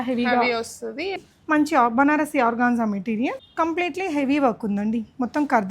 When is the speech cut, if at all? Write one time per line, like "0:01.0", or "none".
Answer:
0:01.2
0:03.4